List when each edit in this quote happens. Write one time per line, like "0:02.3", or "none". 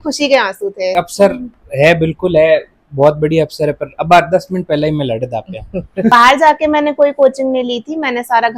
0:00.9
0:06.1